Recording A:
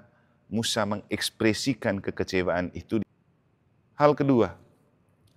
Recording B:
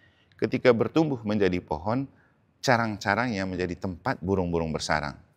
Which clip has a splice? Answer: A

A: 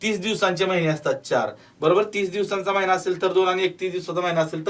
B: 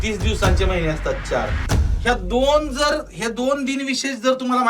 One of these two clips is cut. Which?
B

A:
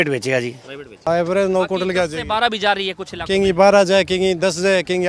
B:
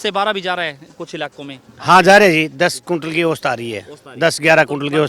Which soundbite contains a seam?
A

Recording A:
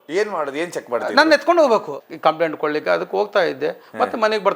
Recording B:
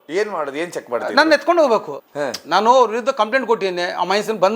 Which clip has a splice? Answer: A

